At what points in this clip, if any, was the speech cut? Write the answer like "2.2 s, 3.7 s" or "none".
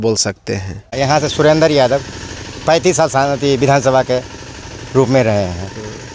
0.9 s